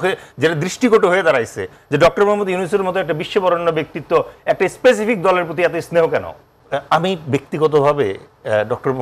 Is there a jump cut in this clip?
yes; 1 cut; at 6.5 s

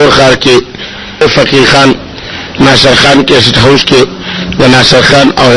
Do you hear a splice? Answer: yes; 1 cut; at 1.2 s

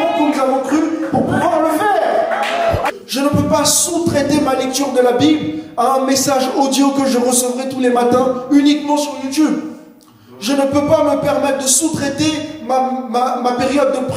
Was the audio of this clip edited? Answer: yes; 1 cut; at 2.9 s

